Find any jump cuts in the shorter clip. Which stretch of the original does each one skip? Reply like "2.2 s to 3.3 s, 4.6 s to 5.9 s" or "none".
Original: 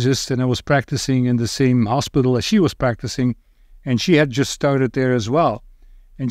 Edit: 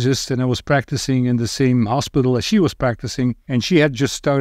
3.4 s to 3.8 s